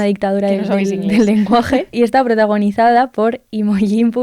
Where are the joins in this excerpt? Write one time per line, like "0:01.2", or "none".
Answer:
0:01.9